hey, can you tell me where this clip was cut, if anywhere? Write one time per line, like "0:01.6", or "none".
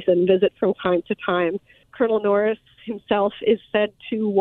0:01.8